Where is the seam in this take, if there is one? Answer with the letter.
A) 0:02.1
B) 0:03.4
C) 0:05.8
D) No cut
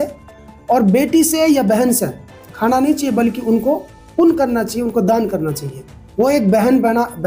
D